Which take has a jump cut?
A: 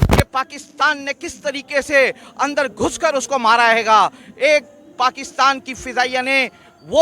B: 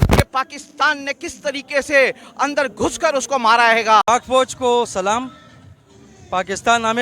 B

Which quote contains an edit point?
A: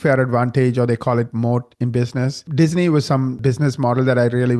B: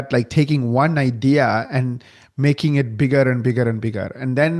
A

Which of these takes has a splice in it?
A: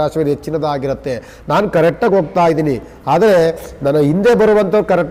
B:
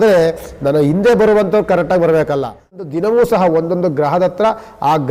B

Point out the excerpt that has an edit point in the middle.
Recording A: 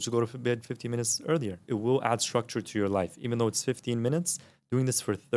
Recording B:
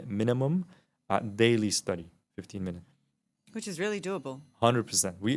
A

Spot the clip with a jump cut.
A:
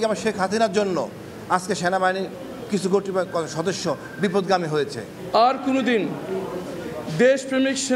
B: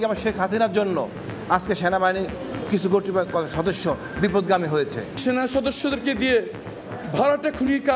B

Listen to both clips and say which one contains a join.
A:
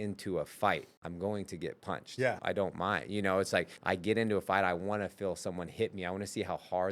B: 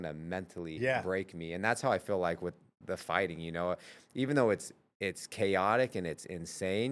A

